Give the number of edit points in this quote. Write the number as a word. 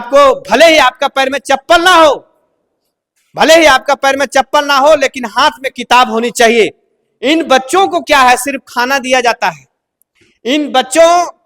zero